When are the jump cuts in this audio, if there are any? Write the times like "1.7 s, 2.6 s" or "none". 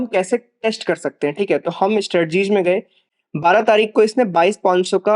3.0 s